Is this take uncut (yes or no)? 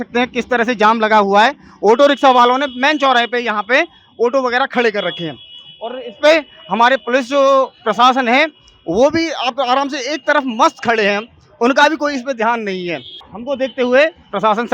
no